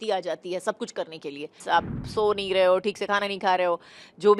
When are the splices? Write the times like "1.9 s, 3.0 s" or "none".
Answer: 1.5 s